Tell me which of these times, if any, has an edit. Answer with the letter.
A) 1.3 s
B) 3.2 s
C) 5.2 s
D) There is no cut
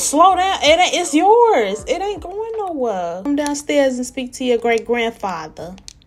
B